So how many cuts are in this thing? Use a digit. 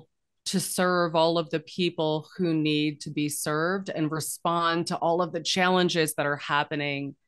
0